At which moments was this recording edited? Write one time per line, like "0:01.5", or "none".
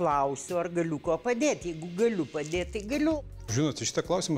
0:03.2